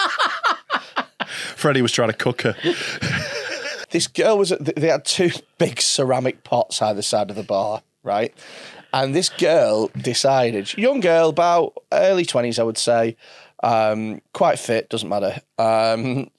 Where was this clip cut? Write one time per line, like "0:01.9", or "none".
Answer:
0:03.8